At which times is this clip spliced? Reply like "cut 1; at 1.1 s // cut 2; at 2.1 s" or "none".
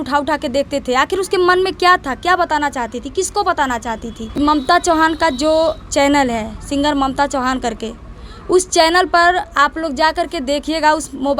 cut 1; at 4.3 s

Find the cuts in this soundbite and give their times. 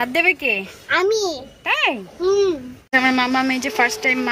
cut 1; at 2.7 s

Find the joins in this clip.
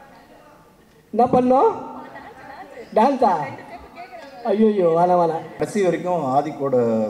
cut 1; at 5.6 s

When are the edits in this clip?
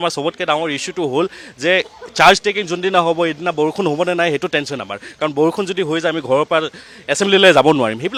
none

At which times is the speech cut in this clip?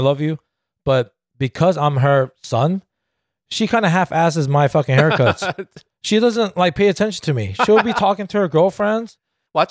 none

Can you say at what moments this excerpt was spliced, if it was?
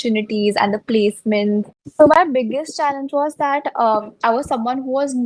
cut 1; at 1.8 s

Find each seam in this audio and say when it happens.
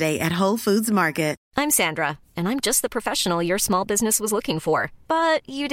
cut 1; at 1.4 s

